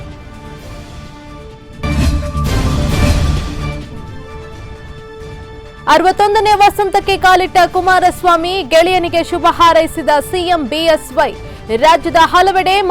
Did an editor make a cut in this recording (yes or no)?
yes